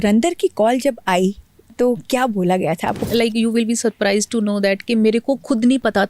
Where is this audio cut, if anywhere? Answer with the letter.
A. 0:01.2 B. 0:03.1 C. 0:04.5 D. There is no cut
B